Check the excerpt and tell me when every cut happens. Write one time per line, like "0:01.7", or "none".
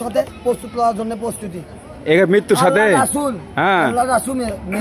none